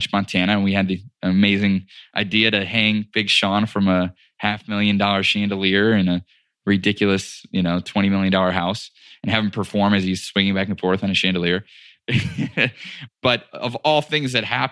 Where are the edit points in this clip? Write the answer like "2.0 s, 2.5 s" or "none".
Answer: 13.1 s